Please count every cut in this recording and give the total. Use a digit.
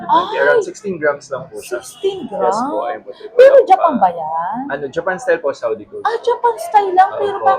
0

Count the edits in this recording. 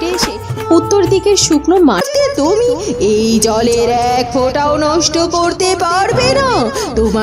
1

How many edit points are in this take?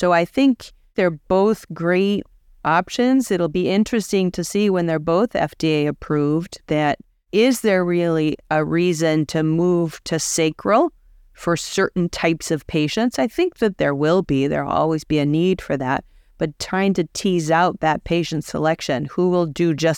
1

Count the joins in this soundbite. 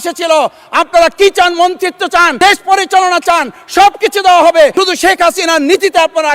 2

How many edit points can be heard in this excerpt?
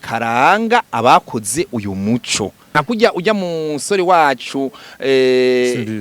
1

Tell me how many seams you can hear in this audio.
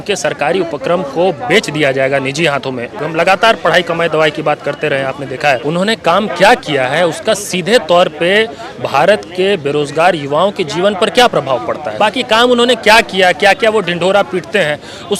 3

